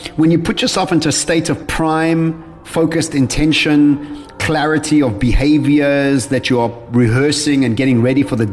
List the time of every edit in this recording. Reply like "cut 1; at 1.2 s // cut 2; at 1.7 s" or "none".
cut 1; at 1.7 s